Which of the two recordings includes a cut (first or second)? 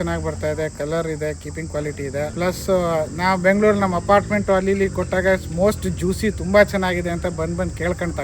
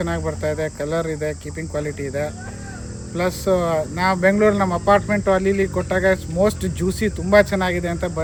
first